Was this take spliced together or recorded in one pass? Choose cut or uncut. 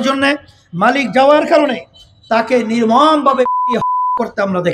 uncut